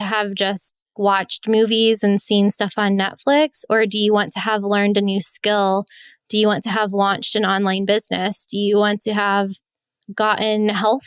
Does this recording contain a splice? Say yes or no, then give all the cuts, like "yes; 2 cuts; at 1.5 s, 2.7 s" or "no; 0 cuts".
yes; 1 cut; at 1.0 s